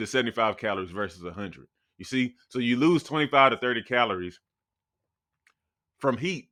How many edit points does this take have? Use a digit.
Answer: 0